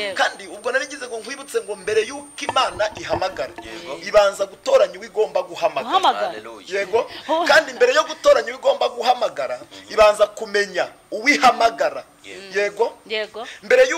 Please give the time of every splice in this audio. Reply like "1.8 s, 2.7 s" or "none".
none